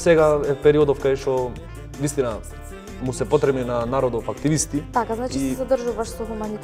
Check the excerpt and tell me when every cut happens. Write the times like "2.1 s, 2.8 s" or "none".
none